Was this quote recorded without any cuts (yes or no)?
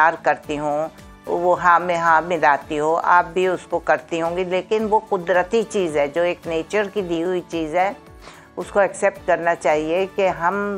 yes